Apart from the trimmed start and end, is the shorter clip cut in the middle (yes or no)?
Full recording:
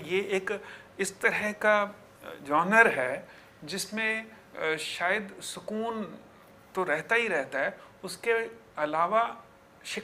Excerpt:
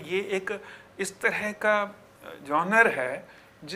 no